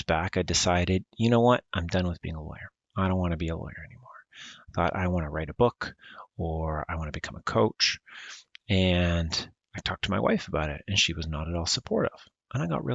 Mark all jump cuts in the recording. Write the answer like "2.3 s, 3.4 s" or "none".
none

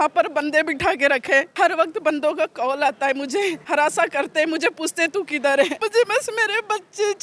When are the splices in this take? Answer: 1.5 s, 3.6 s, 5.8 s

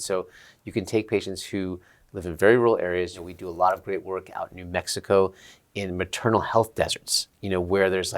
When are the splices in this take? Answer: 3.2 s

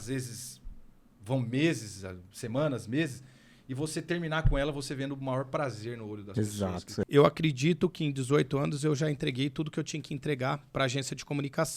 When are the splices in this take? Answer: 7.0 s

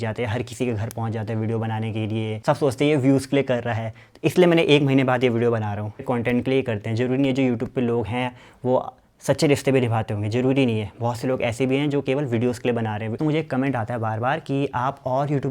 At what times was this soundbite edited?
2.3 s, 6.0 s, 13.2 s

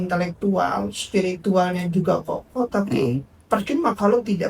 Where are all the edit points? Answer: none

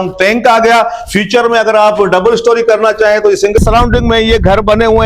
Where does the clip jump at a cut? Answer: 3.6 s

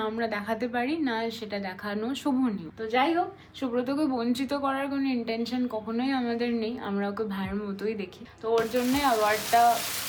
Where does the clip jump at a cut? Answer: none

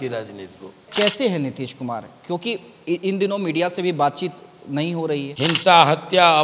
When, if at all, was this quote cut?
0.8 s, 5.3 s

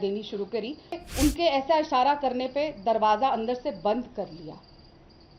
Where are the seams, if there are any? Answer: 1.0 s

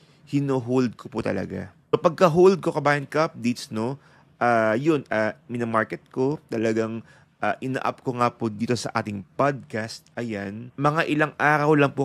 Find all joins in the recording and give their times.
1.9 s

